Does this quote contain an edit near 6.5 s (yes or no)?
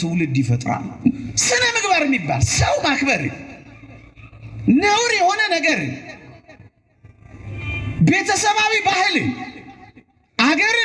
no